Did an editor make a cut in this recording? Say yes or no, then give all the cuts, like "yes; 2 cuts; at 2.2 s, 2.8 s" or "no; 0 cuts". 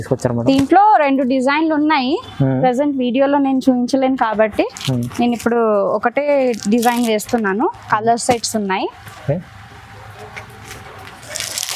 no; 0 cuts